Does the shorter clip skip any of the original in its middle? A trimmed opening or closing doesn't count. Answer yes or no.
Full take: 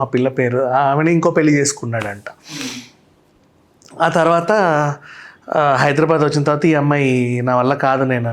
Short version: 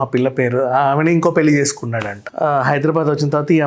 yes